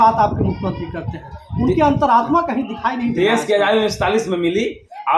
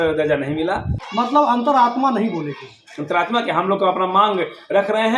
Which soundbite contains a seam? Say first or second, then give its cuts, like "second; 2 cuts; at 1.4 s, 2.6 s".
second; 1 cut; at 1.0 s